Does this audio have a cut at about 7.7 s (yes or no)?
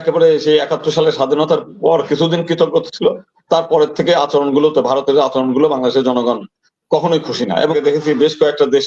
yes